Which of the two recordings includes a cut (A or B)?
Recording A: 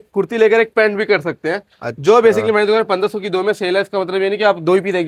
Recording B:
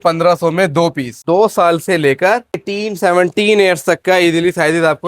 B